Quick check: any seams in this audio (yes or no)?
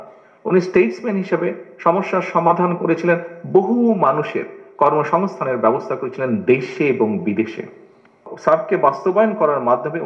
yes